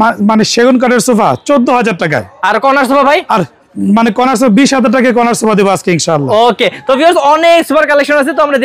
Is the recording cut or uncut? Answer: uncut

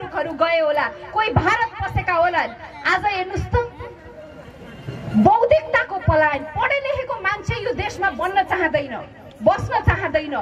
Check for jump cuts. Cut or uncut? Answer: uncut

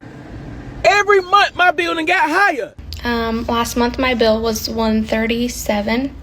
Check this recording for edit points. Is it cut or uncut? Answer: cut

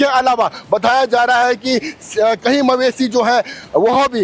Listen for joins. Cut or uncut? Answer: cut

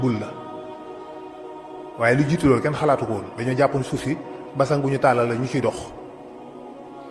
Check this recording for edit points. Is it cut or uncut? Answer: uncut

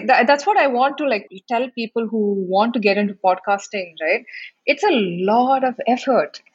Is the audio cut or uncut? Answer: cut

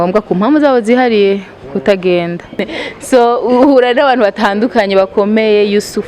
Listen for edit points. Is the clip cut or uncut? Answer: cut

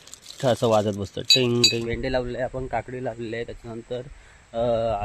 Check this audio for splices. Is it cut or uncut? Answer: cut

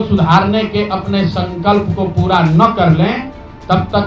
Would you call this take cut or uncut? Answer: uncut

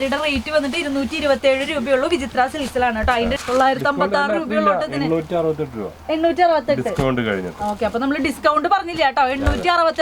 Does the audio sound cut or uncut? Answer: cut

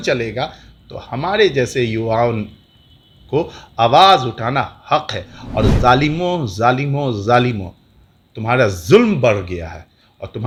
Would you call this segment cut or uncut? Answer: uncut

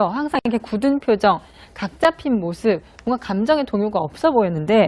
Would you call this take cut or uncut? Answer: cut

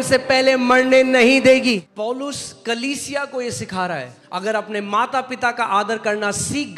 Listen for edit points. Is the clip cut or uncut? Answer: cut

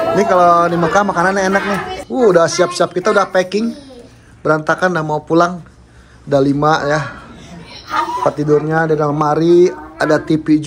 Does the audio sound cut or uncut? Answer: cut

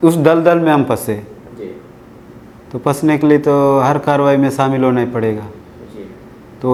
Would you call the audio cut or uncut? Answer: uncut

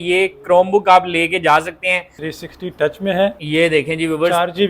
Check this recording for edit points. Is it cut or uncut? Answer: cut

